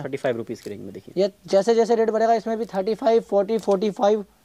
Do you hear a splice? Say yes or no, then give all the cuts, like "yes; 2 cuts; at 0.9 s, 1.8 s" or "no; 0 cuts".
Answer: no; 0 cuts